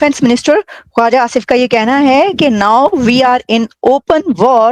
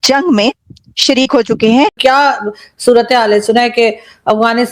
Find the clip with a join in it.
second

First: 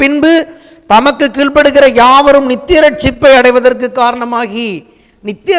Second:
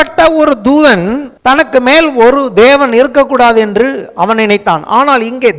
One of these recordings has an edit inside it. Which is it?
second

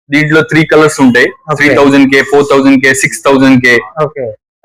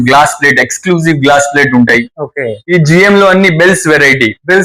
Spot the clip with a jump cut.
second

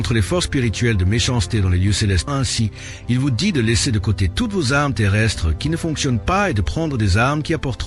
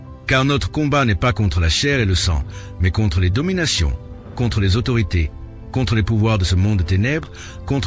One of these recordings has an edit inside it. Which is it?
first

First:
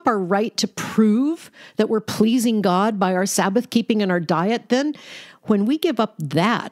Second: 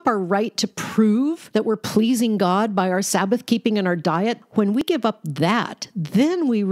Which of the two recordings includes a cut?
second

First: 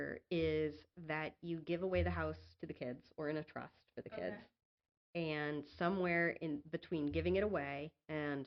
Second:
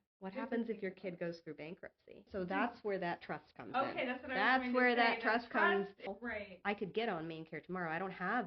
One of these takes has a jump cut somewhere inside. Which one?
second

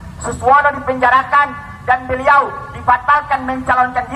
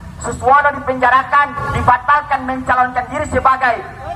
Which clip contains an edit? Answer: second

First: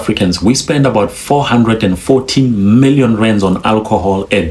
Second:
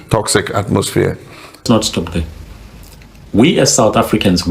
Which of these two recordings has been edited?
second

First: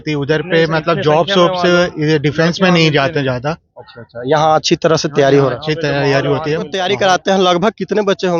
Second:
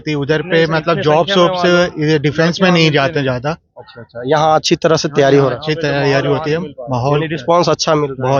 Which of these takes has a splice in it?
first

